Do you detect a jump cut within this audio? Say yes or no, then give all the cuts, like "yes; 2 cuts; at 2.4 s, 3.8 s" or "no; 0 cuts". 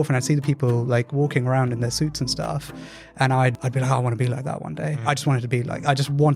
yes; 1 cut; at 3.6 s